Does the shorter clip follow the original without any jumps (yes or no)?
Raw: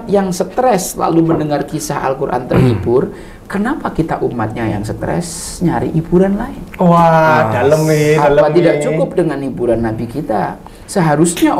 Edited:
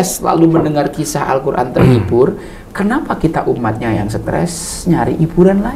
yes